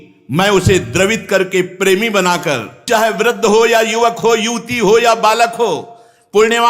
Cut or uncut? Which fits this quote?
cut